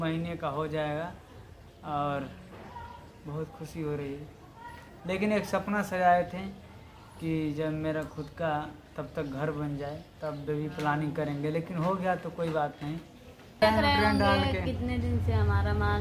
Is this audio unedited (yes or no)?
yes